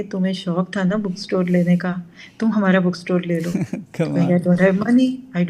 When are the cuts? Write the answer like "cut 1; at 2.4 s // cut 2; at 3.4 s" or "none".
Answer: none